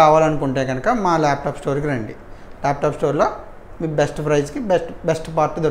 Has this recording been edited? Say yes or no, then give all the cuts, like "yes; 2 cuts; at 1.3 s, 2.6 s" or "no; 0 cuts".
no; 0 cuts